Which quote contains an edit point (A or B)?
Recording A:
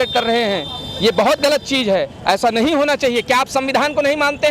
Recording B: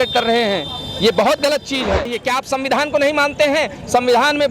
B